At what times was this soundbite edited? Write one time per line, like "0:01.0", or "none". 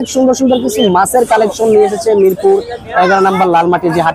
none